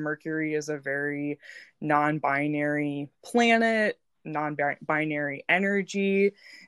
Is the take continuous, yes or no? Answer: yes